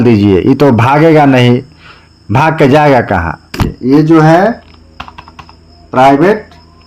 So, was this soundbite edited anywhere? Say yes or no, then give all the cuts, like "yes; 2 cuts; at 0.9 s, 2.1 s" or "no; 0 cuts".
yes; 1 cut; at 3.7 s